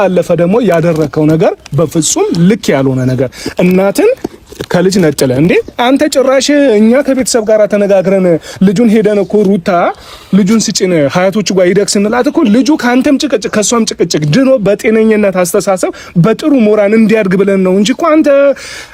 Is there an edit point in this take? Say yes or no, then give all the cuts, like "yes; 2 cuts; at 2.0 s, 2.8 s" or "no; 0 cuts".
no; 0 cuts